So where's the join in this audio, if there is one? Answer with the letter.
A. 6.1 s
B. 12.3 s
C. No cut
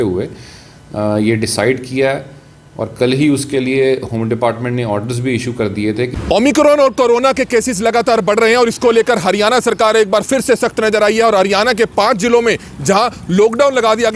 A